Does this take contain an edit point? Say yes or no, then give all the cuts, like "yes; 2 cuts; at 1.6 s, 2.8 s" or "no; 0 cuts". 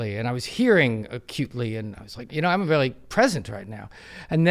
yes; 1 cut; at 2.3 s